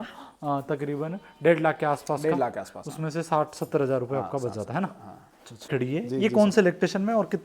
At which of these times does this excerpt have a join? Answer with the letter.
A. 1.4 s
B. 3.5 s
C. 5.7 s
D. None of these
C